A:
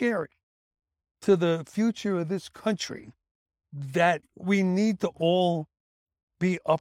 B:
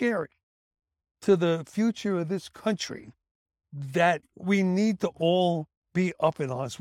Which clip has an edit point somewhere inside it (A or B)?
B